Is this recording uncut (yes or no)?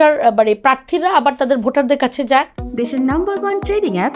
no